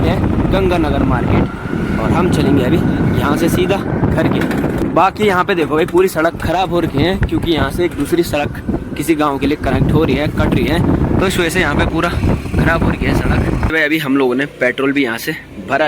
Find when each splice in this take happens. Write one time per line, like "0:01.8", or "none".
0:04.8
0:13.7